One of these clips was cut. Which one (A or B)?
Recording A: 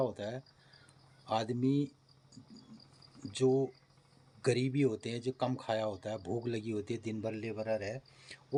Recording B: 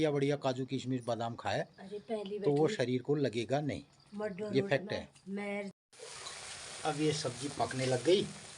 B